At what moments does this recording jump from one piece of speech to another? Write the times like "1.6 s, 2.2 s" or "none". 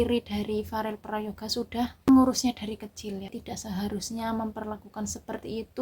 2.1 s, 3.4 s